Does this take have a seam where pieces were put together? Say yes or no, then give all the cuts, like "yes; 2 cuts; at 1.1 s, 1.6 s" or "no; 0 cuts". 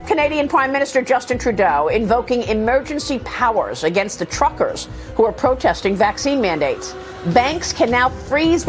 no; 0 cuts